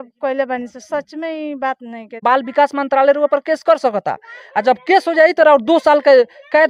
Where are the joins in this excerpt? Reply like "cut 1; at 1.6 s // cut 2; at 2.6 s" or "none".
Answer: cut 1; at 2.2 s